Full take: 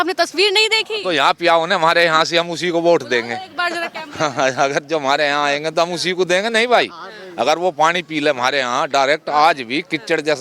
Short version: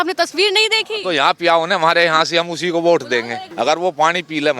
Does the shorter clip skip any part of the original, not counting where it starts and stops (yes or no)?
yes